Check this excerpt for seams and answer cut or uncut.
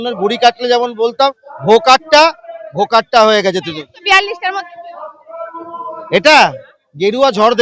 uncut